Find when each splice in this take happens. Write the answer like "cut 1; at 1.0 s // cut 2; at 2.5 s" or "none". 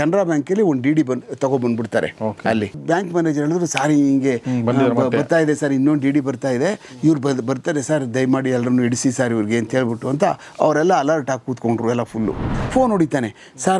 cut 1; at 2.8 s // cut 2; at 12.5 s